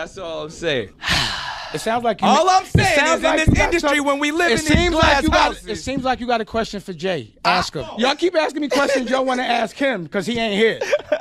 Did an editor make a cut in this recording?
yes; 2 cuts; at 1.0 s, 8.0 s

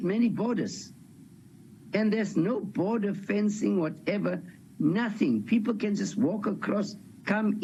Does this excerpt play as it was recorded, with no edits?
yes; 0 cuts

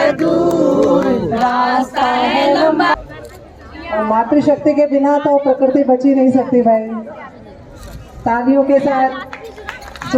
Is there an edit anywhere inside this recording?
yes; 1 cut; at 3.0 s

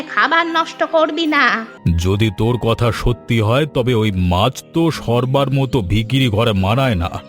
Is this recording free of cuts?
no; 1 cut; at 1.7 s

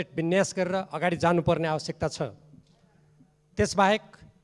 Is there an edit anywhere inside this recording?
no; 0 cuts

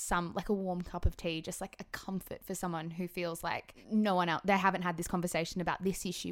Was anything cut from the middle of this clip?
yes; 1 cut; at 3.7 s

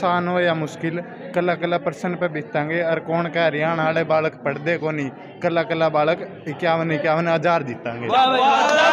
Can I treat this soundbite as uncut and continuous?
yes; 0 cuts

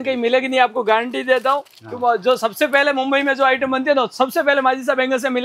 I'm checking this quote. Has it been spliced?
no; 0 cuts

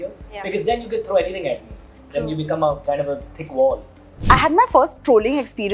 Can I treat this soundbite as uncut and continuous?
no; 1 cut; at 4.1 s

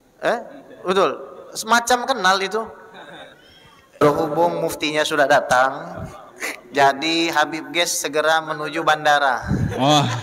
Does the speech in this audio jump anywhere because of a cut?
yes; 1 cut; at 4.0 s

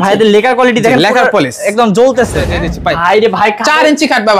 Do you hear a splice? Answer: yes; 1 cut; at 2.6 s

